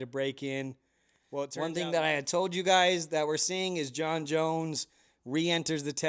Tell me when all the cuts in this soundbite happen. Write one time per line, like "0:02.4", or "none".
0:01.5